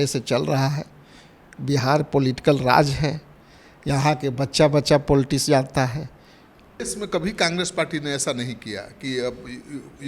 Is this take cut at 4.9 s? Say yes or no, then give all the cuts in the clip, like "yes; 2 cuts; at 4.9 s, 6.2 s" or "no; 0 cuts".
no; 1 cut; at 6.8 s